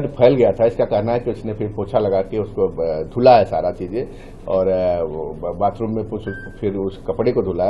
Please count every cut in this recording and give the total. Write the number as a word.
zero